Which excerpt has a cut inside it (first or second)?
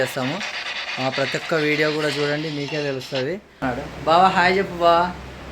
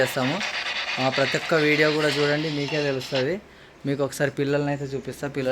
first